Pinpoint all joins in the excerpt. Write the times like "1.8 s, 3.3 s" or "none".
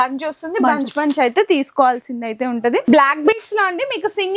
none